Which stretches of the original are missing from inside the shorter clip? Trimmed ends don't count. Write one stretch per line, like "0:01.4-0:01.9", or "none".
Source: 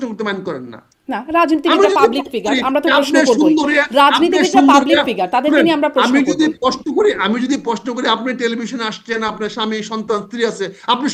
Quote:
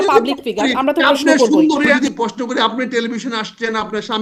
0:03.8-0:07.4